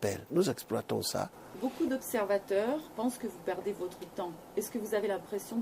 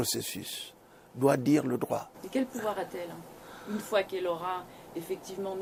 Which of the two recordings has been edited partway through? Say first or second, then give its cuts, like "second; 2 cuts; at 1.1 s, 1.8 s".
first; 1 cut; at 0.9 s